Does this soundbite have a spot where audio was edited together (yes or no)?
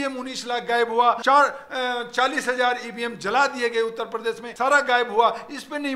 yes